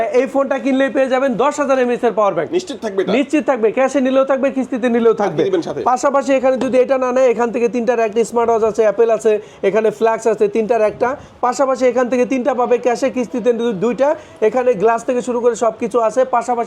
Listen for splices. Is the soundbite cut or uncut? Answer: uncut